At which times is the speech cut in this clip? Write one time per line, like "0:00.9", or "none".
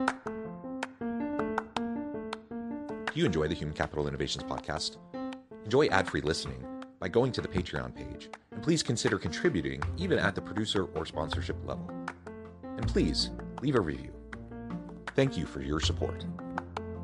none